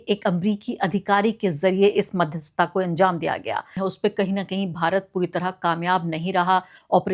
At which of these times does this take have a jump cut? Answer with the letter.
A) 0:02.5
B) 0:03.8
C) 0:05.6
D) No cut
B